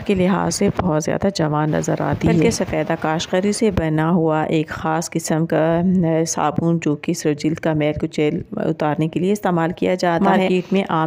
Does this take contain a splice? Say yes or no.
no